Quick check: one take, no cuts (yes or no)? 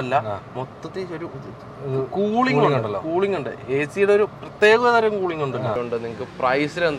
no